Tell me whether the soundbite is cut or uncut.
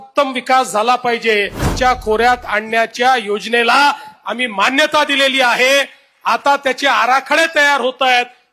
cut